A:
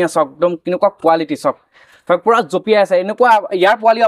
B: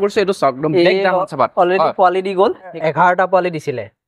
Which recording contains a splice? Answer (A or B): B